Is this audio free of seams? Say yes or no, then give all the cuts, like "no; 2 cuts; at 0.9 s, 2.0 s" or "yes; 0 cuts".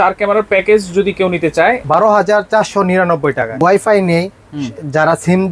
no; 2 cuts; at 1.8 s, 3.5 s